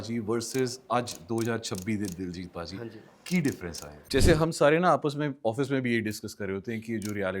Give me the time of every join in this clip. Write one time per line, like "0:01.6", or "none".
0:04.0